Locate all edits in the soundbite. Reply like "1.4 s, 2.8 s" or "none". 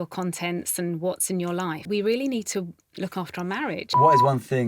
1.8 s, 4.0 s